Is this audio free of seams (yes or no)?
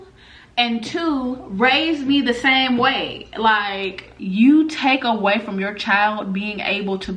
no